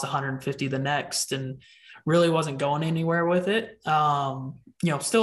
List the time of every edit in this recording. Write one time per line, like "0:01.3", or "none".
none